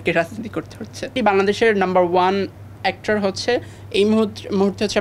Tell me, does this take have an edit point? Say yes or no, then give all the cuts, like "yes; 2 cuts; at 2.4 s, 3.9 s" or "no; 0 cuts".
yes; 1 cut; at 1.1 s